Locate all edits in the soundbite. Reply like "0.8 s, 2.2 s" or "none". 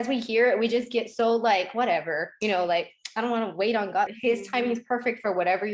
4.1 s